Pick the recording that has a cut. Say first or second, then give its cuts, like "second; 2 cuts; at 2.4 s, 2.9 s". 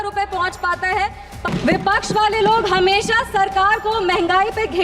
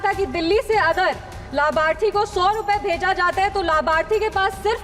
first; 1 cut; at 1.4 s